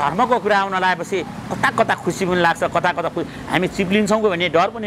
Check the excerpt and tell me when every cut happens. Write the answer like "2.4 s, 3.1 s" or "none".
none